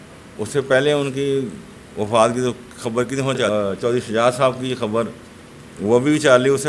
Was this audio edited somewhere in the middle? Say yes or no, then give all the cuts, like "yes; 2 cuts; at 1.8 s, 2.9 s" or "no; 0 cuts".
yes; 1 cut; at 3.5 s